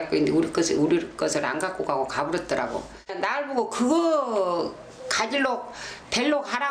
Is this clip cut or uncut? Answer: uncut